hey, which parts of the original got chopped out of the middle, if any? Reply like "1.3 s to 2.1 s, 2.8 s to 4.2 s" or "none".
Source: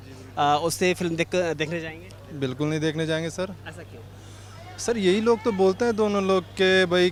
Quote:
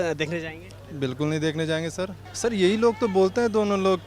3.6 s to 4.7 s